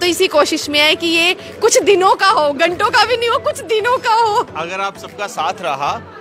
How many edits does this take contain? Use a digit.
0